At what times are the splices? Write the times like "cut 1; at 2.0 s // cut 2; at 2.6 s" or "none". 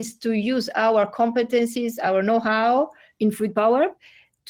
none